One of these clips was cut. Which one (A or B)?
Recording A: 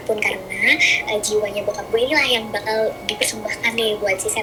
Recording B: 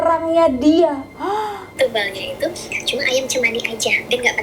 B